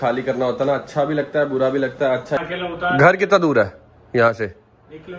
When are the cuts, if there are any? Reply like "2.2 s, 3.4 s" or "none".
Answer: 2.4 s